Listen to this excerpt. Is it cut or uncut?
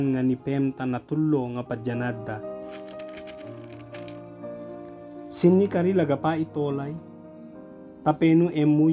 cut